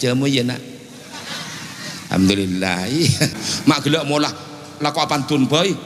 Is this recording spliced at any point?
yes; 1 cut; at 3.4 s

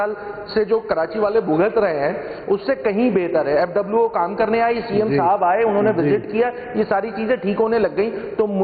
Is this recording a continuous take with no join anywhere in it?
yes; 0 cuts

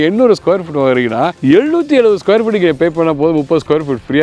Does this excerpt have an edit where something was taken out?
yes; 1 cut; at 1.3 s

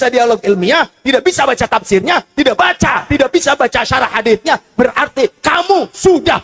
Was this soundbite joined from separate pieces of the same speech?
no; 0 cuts

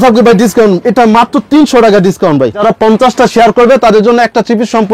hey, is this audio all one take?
no; 1 cut; at 2.6 s

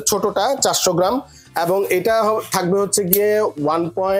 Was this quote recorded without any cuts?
yes; 0 cuts

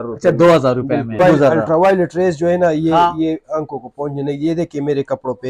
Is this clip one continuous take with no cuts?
no; 1 cut; at 1.2 s

